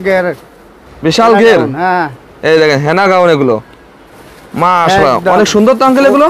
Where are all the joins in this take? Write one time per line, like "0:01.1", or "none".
none